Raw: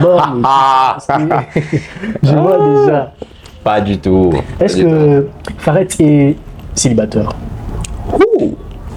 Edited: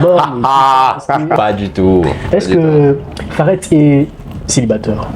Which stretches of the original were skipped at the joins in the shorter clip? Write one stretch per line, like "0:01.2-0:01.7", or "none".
0:01.4-0:03.6